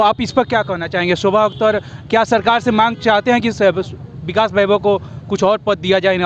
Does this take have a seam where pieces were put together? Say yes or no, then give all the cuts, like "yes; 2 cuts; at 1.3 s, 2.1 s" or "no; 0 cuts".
no; 0 cuts